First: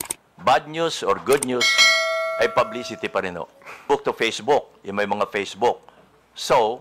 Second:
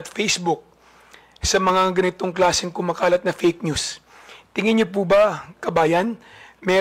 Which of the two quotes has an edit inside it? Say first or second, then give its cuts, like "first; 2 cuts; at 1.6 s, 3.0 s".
first; 1 cut; at 3.8 s